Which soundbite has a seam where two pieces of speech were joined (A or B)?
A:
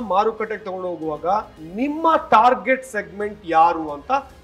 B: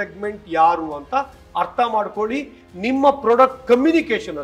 A